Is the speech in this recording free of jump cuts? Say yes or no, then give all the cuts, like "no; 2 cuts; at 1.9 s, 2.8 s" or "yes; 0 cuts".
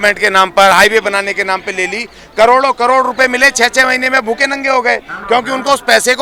yes; 0 cuts